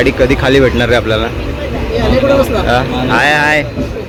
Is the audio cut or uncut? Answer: uncut